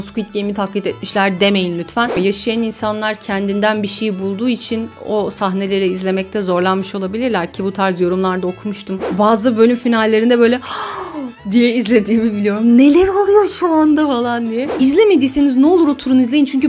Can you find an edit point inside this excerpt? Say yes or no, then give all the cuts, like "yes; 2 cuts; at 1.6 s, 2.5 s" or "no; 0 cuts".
yes; 3 cuts; at 2.2 s, 9.1 s, 14.7 s